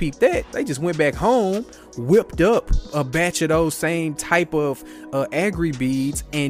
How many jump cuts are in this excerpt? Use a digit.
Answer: 1